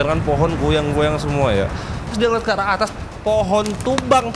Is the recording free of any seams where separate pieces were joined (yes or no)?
no